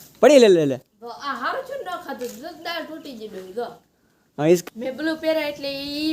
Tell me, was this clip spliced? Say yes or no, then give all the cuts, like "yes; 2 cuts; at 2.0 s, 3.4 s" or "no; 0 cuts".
yes; 1 cut; at 4.6 s